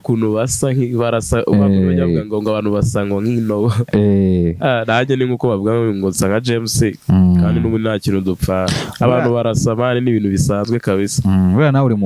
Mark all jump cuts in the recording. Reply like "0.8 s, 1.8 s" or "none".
none